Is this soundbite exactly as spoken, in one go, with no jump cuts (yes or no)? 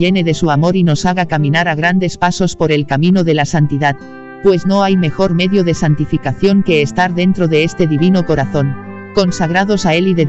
yes